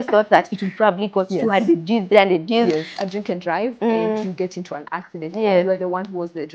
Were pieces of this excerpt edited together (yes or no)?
yes